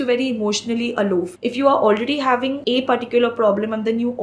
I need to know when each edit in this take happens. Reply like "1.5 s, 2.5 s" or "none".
1.4 s, 2.6 s